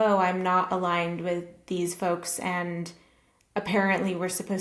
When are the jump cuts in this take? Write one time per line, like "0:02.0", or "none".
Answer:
none

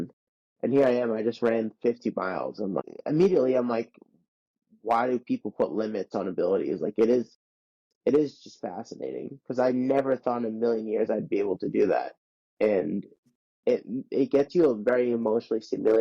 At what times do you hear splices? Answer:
0:02.8
0:13.4

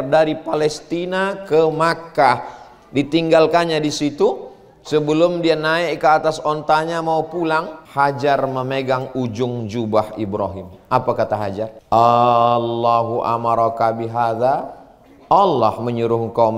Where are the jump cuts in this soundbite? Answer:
0:07.8
0:11.7

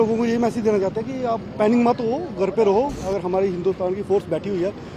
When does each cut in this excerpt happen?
0:03.0

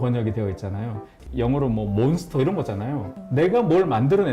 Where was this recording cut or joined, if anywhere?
0:01.2

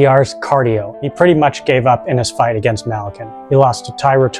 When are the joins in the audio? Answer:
0:01.0
0:03.3

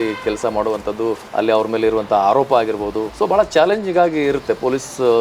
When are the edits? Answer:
0:01.2
0:03.0

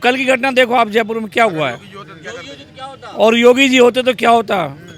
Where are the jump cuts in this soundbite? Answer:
none

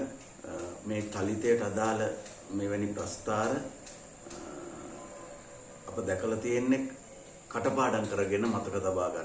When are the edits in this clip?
none

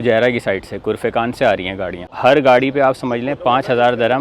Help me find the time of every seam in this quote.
0:02.1

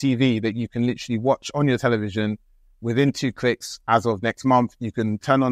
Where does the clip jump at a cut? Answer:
none

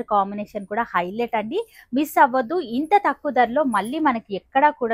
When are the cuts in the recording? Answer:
none

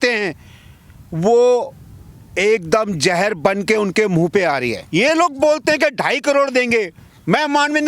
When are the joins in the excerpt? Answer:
0:04.8

